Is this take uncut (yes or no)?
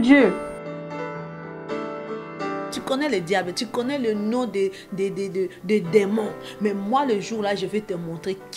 yes